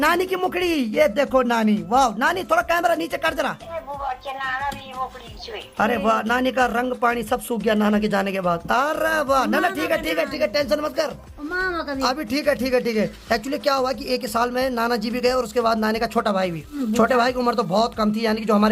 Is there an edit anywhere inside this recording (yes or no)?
no